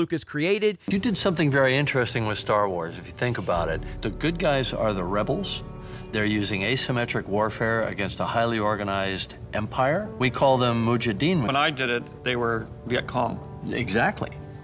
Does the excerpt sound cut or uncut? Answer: cut